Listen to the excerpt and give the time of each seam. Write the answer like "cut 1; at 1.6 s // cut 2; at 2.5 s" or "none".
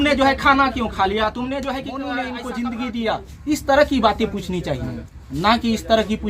cut 1; at 2.0 s